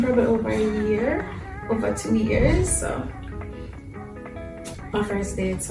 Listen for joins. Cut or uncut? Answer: uncut